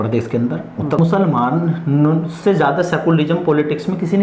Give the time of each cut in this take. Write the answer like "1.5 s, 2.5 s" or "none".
1.0 s